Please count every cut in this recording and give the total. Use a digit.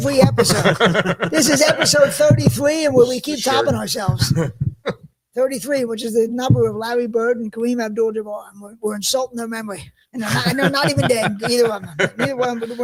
0